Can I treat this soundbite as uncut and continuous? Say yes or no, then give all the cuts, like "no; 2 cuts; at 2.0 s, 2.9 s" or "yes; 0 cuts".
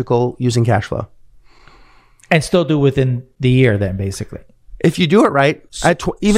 yes; 0 cuts